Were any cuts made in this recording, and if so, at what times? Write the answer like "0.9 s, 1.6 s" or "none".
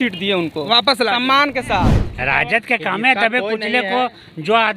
2.1 s

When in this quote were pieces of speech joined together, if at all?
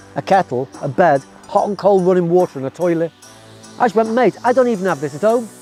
none

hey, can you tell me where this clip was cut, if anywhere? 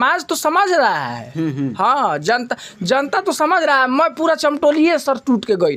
none

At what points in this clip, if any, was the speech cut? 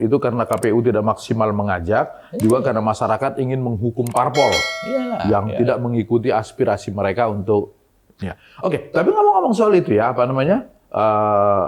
none

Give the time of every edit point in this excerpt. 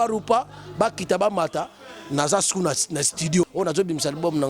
3.5 s

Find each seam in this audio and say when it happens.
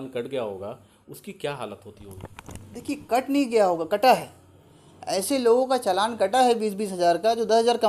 none

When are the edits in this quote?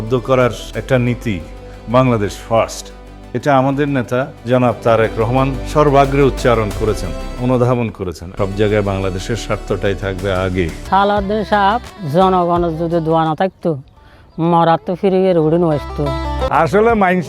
8.3 s, 10.8 s, 16.5 s

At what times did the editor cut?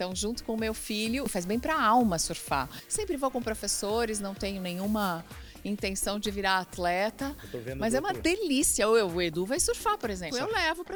none

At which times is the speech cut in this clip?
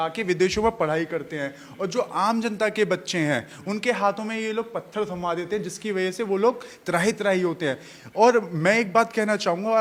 none

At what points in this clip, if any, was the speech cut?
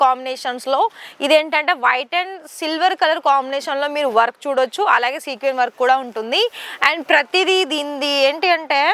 none

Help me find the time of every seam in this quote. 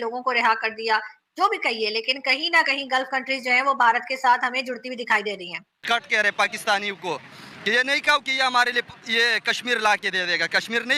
5.8 s

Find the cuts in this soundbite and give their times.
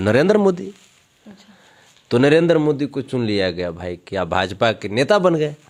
none

